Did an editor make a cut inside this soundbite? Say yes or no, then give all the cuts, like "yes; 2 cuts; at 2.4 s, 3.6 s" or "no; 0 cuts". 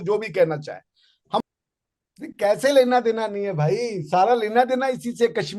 yes; 1 cut; at 1.4 s